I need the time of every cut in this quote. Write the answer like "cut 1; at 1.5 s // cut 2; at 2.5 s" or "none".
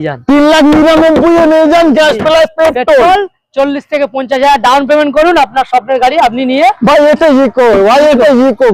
none